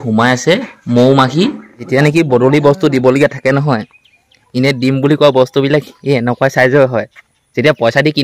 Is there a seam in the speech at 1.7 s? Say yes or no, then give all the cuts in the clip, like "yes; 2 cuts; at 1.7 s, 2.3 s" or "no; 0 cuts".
yes; 1 cut; at 1.7 s